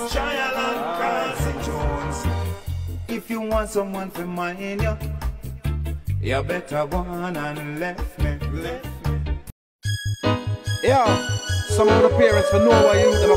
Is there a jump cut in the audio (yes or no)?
yes